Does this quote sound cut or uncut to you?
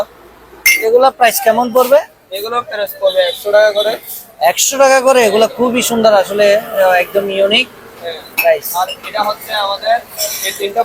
uncut